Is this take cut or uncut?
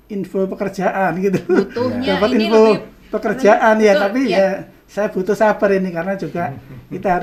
uncut